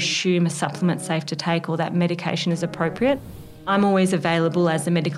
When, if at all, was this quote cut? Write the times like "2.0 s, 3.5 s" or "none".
3.6 s